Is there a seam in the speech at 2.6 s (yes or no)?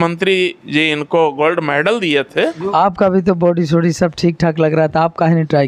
yes